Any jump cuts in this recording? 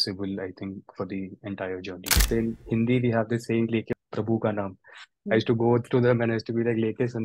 yes; 2 cuts; at 2.1 s, 4.0 s

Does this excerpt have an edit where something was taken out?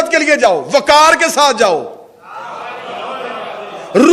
no; 0 cuts

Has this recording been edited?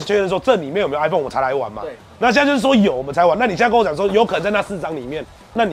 no; 0 cuts

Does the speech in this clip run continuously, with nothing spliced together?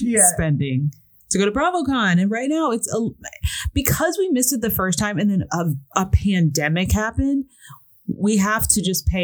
yes; 0 cuts

